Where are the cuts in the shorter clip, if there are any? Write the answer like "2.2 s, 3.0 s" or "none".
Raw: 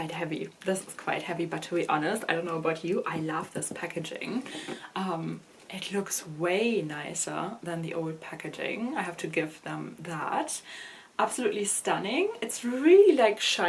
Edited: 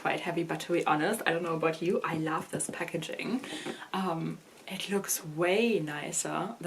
none